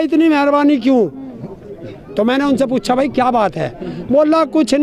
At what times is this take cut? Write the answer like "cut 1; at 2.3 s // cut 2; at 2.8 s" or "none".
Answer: none